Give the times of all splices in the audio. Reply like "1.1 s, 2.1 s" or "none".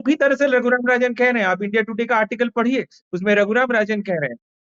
none